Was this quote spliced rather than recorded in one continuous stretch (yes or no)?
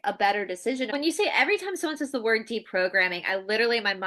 yes